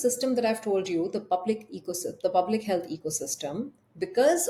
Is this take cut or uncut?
uncut